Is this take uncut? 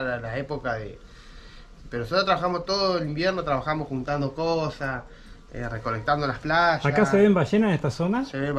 yes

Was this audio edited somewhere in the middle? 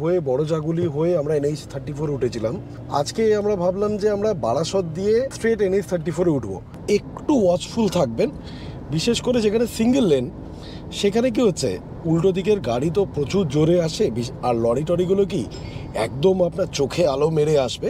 yes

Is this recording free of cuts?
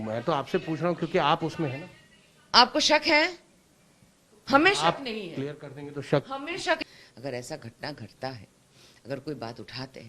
no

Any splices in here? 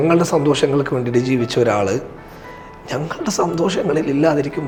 no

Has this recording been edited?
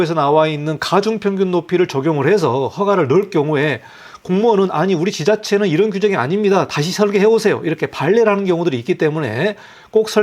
no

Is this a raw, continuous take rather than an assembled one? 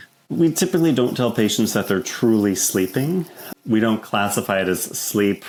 yes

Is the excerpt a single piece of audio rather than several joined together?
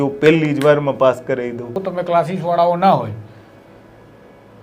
no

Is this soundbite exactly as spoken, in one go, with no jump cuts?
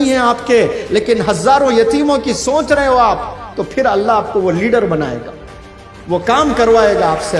yes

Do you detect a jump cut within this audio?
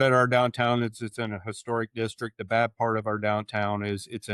no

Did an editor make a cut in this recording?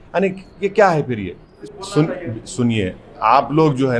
yes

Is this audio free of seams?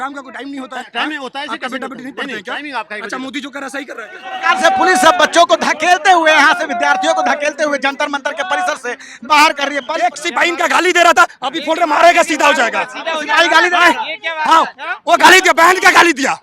no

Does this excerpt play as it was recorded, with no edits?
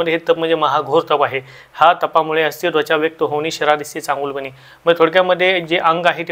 yes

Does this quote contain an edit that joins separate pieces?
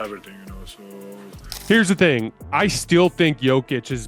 yes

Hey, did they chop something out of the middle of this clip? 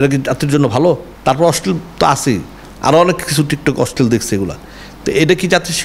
yes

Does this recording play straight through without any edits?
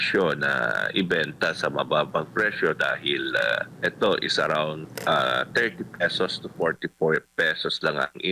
no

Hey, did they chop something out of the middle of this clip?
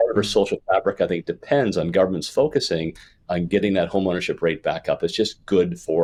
no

